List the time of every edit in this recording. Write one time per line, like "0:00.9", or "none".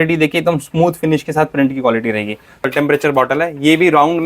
0:02.6